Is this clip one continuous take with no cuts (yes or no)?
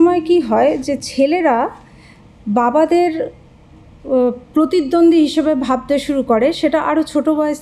yes